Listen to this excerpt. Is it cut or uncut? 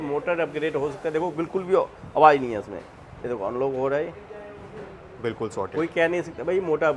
uncut